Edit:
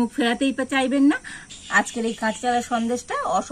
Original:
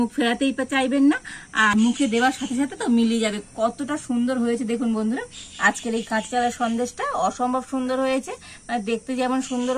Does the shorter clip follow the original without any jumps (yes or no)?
no